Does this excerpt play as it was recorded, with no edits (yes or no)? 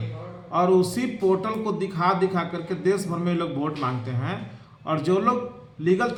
yes